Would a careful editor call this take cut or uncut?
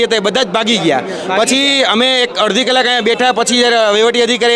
uncut